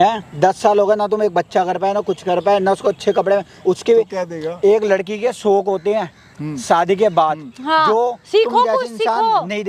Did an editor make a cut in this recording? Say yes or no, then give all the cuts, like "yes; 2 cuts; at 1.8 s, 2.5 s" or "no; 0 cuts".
no; 0 cuts